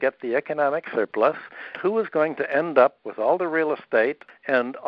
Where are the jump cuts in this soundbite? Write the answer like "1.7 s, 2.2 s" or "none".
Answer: 1.7 s, 3.1 s